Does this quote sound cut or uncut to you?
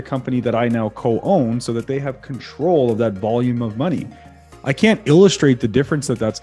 uncut